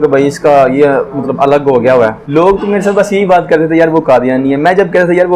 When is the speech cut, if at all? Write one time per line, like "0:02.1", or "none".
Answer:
0:02.2